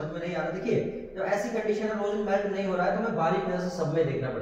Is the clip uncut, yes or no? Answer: yes